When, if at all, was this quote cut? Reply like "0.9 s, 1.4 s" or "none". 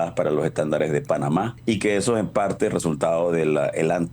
1.5 s

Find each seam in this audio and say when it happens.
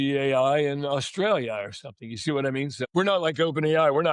2.8 s

